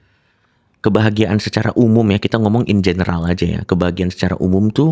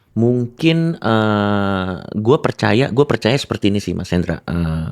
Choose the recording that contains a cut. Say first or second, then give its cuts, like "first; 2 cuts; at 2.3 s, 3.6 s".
second; 1 cut; at 0.9 s